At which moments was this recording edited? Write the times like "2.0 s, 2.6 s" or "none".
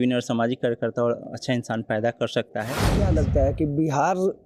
2.8 s